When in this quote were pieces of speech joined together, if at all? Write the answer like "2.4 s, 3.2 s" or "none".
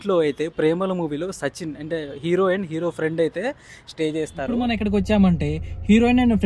4.6 s